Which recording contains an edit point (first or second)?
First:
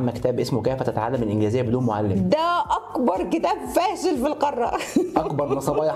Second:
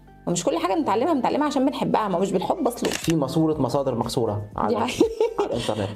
second